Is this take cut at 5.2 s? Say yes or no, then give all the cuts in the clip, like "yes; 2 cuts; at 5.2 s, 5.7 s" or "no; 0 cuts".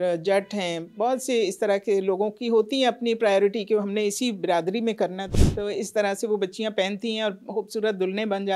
yes; 1 cut; at 5.2 s